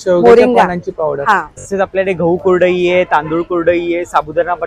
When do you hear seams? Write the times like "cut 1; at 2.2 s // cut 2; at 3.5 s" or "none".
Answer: cut 1; at 1.7 s